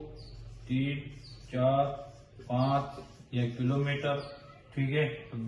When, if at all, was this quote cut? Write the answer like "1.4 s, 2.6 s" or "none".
none